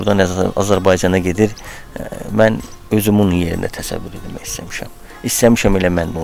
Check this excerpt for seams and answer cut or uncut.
uncut